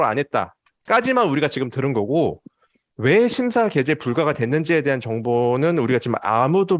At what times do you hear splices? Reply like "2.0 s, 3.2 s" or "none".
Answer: none